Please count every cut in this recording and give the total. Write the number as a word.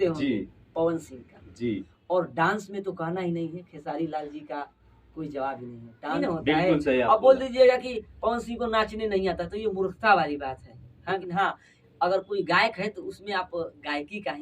three